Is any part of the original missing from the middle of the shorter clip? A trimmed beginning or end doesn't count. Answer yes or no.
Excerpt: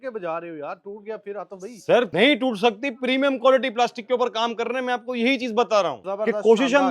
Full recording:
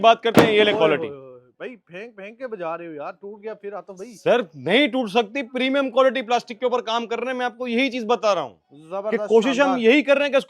yes